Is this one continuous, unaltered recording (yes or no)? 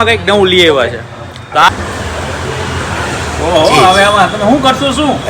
no